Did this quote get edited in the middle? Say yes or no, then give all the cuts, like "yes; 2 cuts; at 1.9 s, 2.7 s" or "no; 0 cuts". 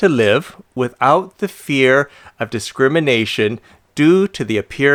no; 0 cuts